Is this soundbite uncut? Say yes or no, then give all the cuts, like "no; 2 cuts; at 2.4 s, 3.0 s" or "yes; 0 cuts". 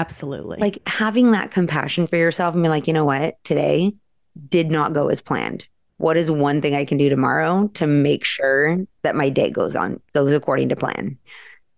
yes; 0 cuts